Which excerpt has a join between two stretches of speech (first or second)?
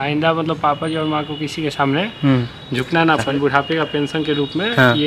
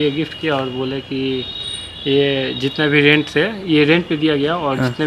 first